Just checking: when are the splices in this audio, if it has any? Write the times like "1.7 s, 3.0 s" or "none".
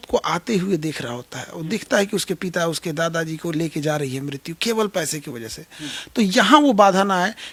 none